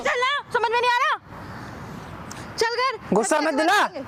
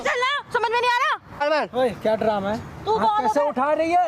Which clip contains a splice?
second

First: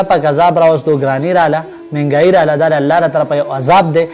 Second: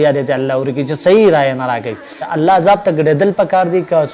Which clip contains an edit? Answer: second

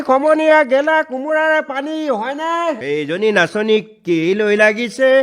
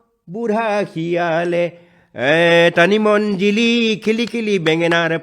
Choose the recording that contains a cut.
first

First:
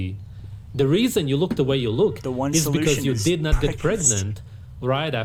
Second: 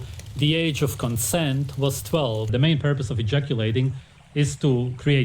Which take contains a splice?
second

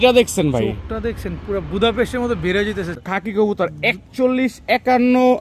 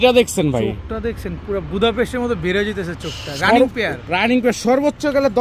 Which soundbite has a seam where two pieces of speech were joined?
first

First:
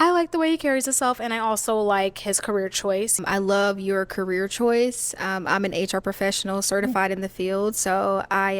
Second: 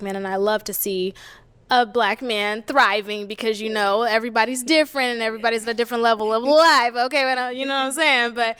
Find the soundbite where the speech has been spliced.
first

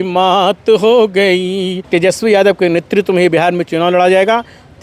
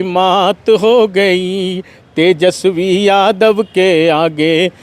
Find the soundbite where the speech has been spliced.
first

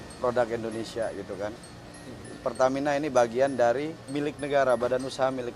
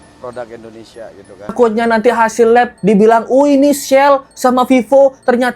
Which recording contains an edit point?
second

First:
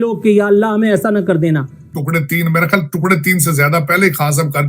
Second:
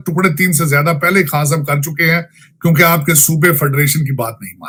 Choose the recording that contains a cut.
first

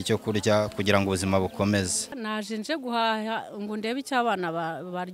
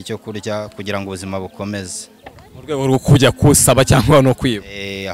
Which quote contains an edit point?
first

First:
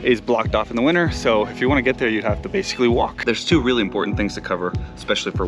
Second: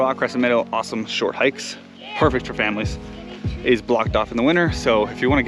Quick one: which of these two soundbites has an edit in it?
first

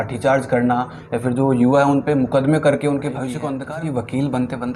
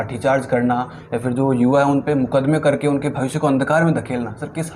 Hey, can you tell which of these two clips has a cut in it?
first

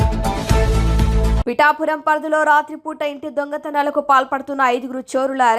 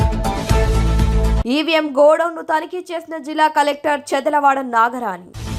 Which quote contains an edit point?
first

